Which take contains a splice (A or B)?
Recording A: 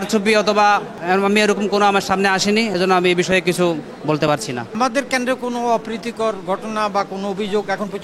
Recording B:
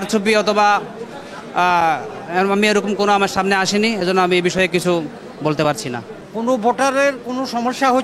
A